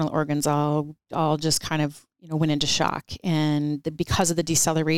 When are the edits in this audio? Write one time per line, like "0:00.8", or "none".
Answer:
0:01.0
0:02.1

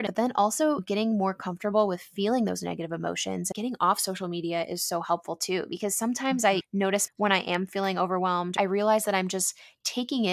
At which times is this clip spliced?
0:03.5
0:07.0
0:08.5

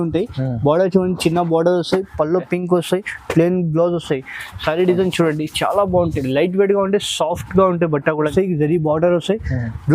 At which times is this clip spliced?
0:08.3

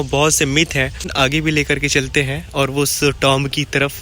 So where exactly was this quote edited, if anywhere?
0:01.1

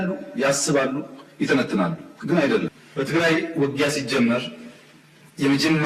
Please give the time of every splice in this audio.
0:02.8

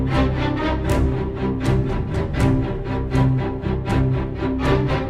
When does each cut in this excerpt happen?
none

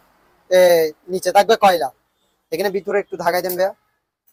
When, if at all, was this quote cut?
none

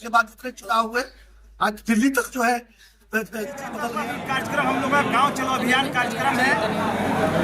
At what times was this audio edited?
0:03.9

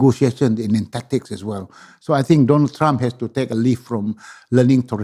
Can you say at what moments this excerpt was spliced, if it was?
none

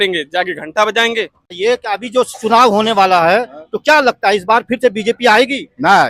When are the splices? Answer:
0:01.4

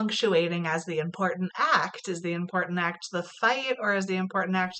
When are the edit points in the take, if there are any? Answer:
none

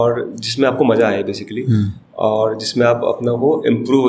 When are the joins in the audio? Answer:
none

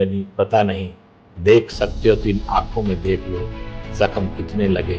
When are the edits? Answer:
none

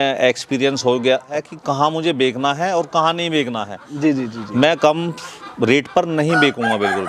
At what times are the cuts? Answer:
0:01.3

